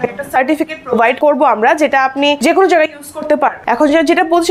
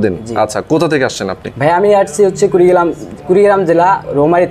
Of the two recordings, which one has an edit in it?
first; 3 cuts; at 1.2 s, 2.4 s, 3.6 s

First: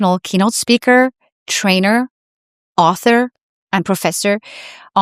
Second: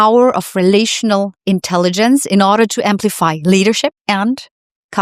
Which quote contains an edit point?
second; 1 cut; at 4.0 s

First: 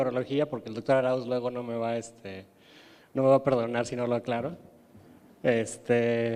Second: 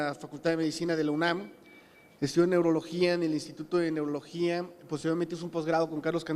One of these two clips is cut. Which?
second; 1 cut; at 0.9 s

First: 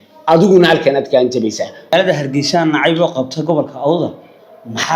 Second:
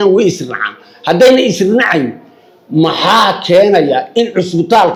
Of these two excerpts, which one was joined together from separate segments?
first; 1 cut; at 1.9 s

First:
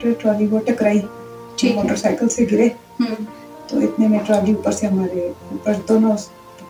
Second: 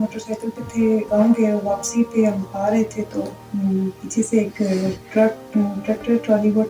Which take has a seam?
second; 3 cuts; at 1.1 s, 3.4 s, 5.0 s

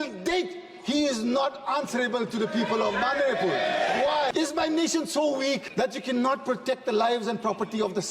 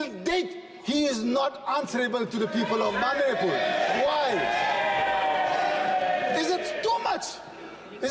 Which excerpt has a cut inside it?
first; 2 cuts; at 4.3 s, 5.7 s

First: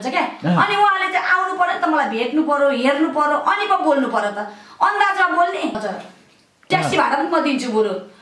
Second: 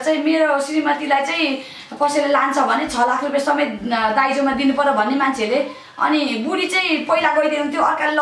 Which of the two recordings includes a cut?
first; 1 cut; at 5.8 s

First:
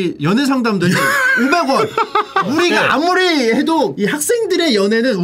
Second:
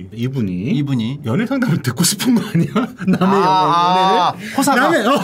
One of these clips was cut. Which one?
first; 2 cuts; at 2.5 s, 3.9 s

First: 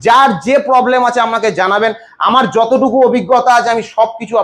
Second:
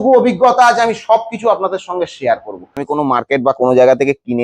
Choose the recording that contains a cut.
second; 1 cut; at 2.8 s

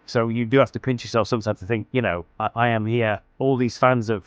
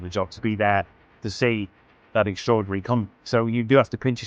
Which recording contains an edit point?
first; 1 cut; at 3.3 s

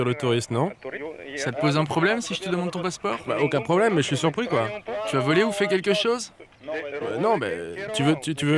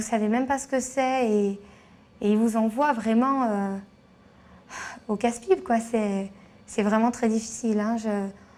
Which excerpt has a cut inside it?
first; 1 cut; at 0.9 s

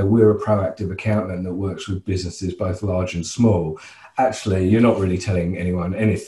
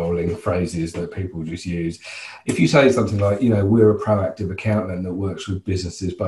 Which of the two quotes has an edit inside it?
second; 1 cut; at 2.3 s

